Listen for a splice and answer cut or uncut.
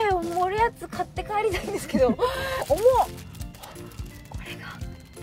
cut